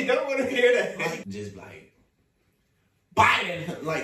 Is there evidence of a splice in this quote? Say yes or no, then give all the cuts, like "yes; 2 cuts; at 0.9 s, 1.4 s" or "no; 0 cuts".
yes; 1 cut; at 1.2 s